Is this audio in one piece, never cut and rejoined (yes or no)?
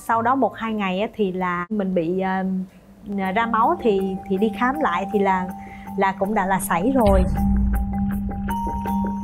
yes